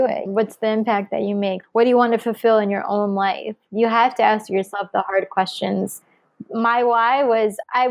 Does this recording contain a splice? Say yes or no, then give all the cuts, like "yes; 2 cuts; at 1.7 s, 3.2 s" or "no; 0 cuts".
no; 0 cuts